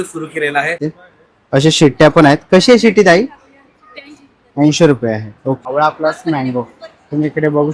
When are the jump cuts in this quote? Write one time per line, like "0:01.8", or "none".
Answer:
0:00.9
0:05.6